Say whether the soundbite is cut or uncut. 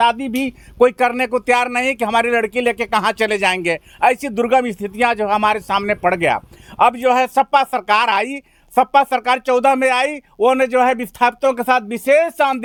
uncut